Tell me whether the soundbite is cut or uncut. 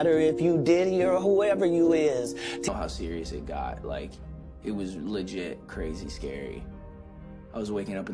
cut